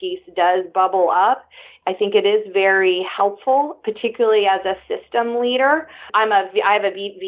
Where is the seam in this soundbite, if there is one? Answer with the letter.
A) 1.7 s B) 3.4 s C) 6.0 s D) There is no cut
C